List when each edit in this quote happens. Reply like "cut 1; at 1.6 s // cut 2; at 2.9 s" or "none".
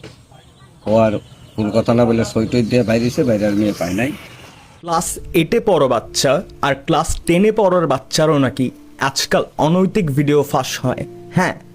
cut 1; at 4.9 s

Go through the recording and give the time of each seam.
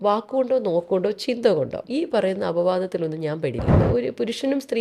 cut 1; at 1.8 s // cut 2; at 3.8 s

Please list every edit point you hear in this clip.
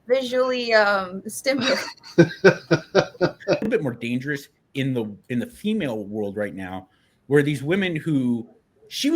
cut 1; at 3.7 s

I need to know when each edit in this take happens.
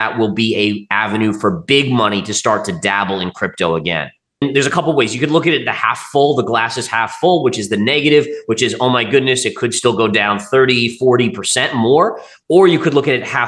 cut 1; at 4.4 s

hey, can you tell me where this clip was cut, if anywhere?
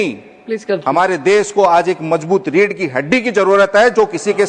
none

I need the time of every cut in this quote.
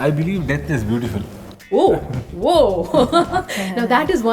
none

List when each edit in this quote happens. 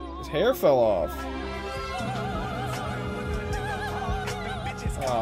none

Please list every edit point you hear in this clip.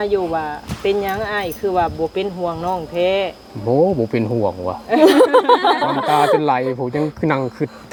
none

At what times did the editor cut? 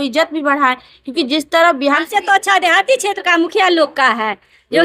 cut 1; at 1.8 s

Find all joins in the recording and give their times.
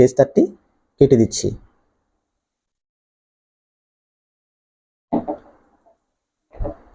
none

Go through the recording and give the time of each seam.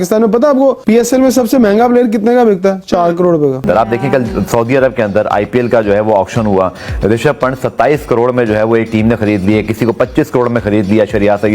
cut 1; at 3.6 s

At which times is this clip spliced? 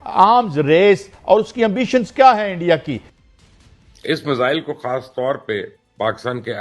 cut 1; at 3.0 s

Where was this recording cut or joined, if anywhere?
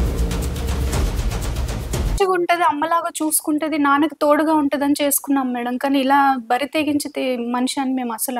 cut 1; at 2.1 s

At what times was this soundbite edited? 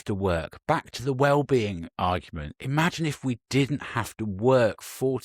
none

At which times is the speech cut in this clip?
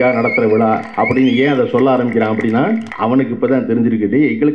cut 1; at 0.9 s // cut 2; at 2.9 s

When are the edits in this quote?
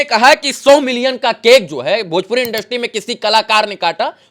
none

